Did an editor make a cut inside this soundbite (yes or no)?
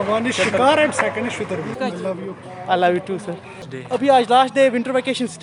yes